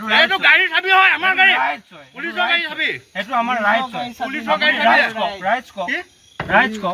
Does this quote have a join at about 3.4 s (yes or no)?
no